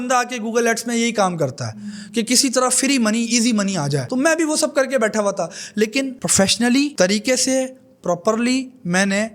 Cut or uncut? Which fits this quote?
uncut